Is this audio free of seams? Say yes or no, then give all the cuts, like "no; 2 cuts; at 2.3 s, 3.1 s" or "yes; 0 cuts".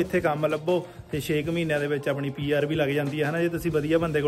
yes; 0 cuts